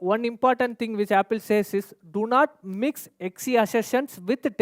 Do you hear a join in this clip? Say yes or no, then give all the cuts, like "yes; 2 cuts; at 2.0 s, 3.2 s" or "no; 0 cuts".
no; 0 cuts